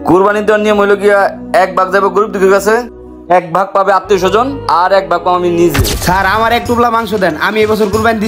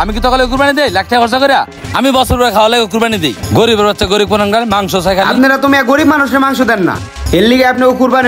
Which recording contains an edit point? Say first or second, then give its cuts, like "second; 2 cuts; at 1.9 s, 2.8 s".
first; 1 cut; at 5.9 s